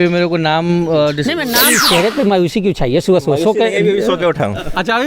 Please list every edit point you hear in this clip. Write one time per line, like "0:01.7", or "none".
0:01.6